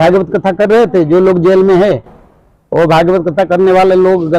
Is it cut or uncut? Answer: uncut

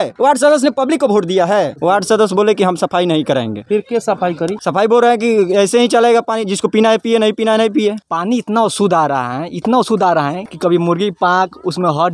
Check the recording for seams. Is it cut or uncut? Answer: cut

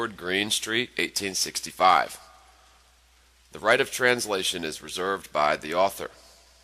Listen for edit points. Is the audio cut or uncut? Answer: cut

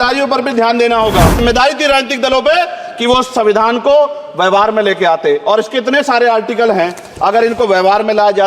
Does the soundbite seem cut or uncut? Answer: cut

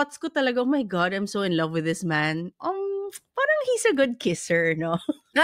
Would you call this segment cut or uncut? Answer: cut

